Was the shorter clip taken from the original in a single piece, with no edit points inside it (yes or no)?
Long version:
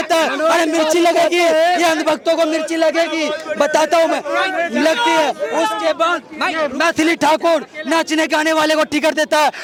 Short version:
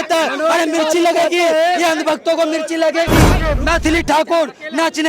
no